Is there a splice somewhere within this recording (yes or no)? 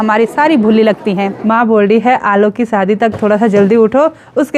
yes